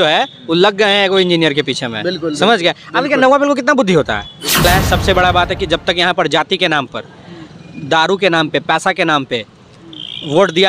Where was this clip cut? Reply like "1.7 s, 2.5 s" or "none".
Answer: 4.6 s